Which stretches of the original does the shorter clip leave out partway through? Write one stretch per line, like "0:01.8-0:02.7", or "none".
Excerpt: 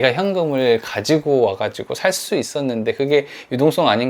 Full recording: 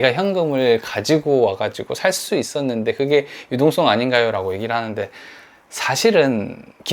none